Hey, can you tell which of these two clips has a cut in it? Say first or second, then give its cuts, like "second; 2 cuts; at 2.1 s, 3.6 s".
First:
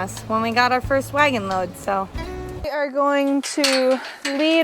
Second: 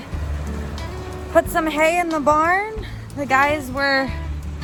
first; 1 cut; at 2.6 s